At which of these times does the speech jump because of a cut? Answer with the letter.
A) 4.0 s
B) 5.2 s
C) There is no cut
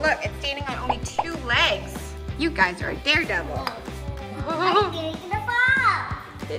A